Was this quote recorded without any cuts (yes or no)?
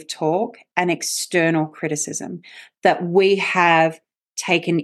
yes